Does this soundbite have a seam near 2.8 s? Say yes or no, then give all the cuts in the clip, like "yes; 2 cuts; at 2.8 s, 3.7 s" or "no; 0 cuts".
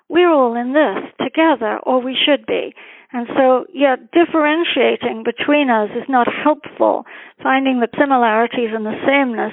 no; 1 cut; at 7.9 s